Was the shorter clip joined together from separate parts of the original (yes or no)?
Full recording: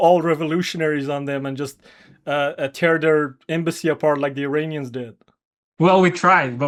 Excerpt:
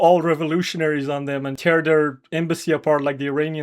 yes